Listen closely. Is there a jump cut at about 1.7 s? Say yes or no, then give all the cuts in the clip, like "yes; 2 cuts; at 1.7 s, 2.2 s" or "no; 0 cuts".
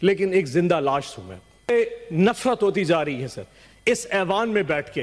yes; 1 cut; at 1.7 s